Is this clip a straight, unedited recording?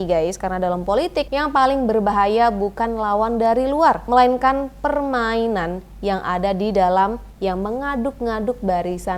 no; 2 cuts; at 1.3 s, 4.0 s

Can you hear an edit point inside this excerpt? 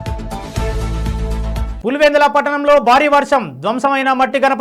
yes; 1 cut; at 1.7 s

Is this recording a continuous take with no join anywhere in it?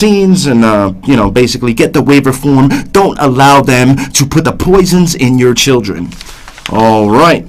yes; 0 cuts

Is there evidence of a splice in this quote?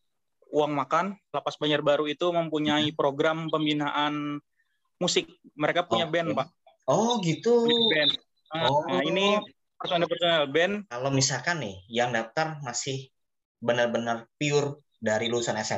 yes; 2 cuts; at 1.4 s, 11.0 s

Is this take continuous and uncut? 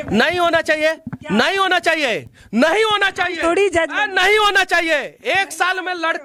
yes; 0 cuts

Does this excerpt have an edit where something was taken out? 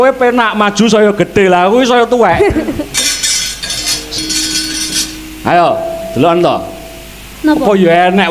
yes; 1 cut; at 4.1 s

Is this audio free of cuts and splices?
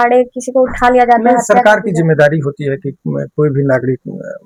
yes; 0 cuts

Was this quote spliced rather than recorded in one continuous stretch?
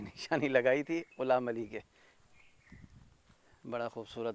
no; 0 cuts

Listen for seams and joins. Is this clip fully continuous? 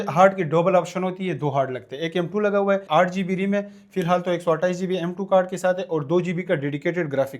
no; 1 cut; at 2.8 s

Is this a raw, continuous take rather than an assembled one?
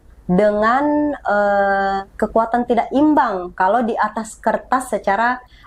yes; 0 cuts

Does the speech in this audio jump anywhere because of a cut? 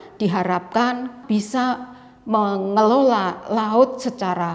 yes; 1 cut; at 1.2 s

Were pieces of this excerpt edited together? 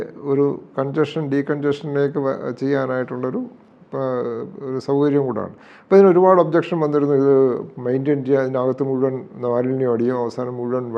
no; 0 cuts

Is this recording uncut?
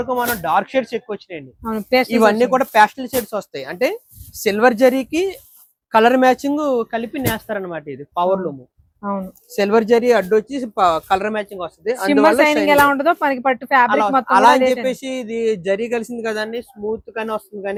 yes; 0 cuts

